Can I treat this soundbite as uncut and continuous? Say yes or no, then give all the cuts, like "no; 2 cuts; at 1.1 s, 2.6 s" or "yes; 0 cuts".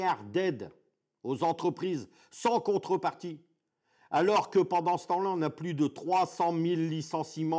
yes; 0 cuts